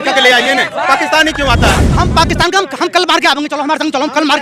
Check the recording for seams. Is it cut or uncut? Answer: cut